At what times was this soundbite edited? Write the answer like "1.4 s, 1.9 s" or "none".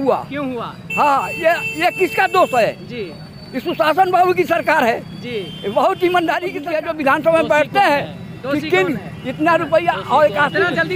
6.6 s